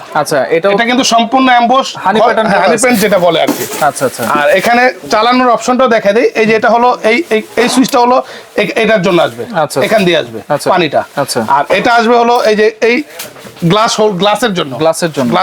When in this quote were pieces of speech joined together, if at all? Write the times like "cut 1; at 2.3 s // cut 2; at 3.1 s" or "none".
none